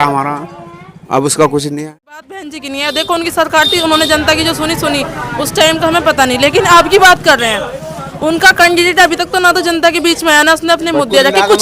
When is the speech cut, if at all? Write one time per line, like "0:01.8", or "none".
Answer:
0:02.3

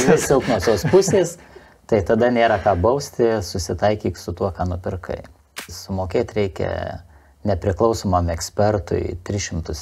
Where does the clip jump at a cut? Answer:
0:05.7

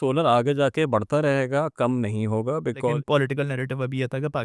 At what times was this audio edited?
0:02.9

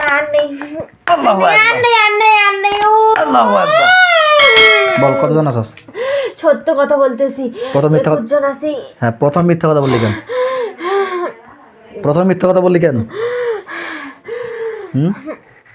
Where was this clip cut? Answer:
none

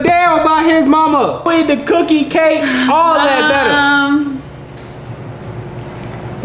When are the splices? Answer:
0:01.5

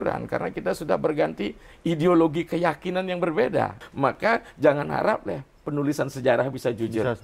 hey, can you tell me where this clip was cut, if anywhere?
0:03.8

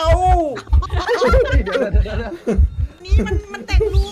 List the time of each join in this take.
0:03.0

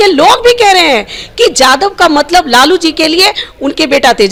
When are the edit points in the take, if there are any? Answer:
none

